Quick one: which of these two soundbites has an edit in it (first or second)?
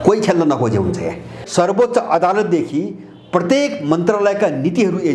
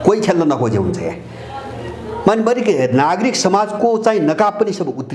first